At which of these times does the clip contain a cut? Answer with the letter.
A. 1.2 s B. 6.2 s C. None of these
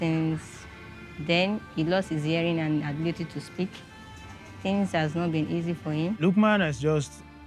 B